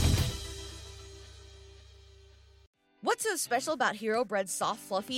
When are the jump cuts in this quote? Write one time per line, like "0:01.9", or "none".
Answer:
0:02.9